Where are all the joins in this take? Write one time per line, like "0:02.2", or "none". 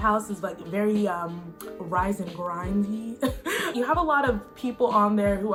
none

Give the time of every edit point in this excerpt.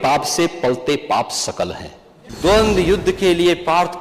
0:02.2

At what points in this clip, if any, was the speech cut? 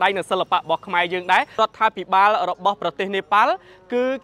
0:01.6

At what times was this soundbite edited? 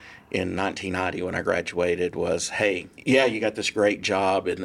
0:02.9

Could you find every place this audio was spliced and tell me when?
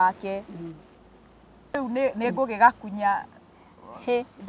0:01.7

